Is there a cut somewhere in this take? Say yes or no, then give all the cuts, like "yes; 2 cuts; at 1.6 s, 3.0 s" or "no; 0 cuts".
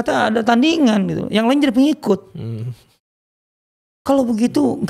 no; 0 cuts